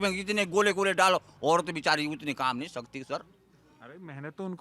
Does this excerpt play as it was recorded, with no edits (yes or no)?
yes